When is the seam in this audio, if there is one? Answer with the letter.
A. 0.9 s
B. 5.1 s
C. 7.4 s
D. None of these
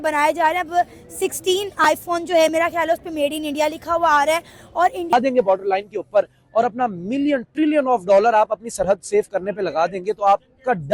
B